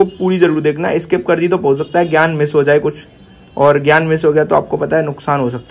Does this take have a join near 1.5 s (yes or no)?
no